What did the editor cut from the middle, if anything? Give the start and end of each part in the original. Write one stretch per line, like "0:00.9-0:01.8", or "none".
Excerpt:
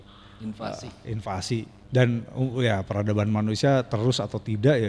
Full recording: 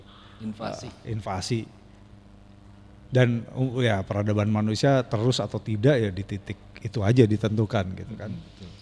0:01.8-0:03.0